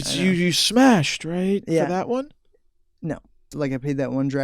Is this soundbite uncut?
no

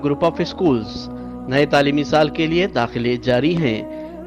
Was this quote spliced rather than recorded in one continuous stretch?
no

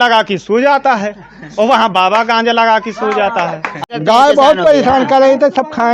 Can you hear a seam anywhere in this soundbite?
yes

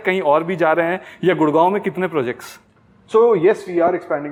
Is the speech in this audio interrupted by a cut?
no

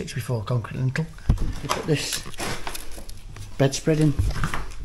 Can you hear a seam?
yes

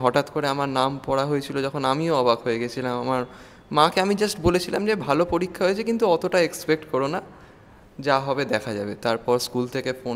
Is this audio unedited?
yes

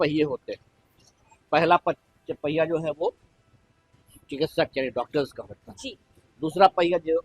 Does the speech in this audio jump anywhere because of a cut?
no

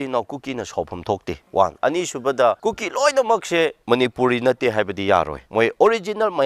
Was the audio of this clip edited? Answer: yes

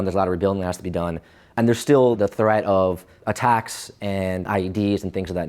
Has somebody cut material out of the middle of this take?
yes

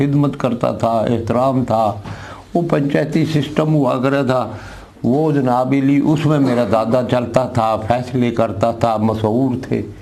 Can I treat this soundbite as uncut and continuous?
yes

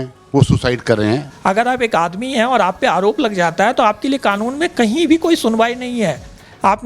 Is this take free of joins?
no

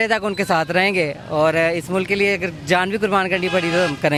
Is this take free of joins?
yes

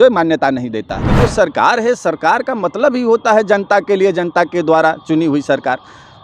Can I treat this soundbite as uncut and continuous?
no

